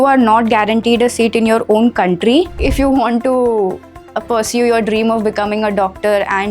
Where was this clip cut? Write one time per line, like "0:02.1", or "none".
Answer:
0:02.5